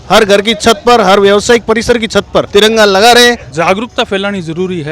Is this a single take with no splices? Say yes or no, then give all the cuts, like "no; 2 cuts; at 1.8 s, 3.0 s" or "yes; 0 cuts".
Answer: no; 1 cut; at 3.5 s